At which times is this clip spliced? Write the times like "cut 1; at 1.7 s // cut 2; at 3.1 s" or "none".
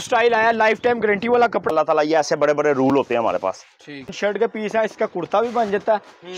cut 1; at 1.7 s // cut 2; at 4.1 s